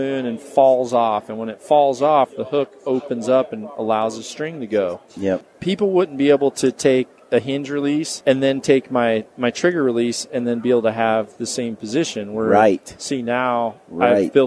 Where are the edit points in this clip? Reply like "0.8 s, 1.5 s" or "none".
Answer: 5.5 s, 8.1 s, 9.3 s